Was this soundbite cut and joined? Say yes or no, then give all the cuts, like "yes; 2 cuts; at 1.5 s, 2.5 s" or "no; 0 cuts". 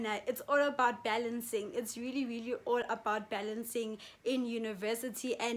no; 0 cuts